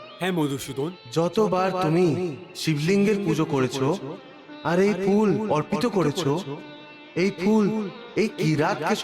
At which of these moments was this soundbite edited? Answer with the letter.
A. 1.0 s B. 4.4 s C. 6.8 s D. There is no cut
A